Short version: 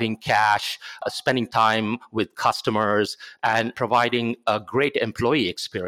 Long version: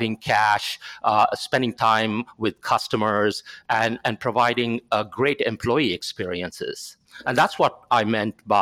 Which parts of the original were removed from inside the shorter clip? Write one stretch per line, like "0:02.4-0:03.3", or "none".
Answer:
0:01.0-0:01.3
0:04.0-0:04.2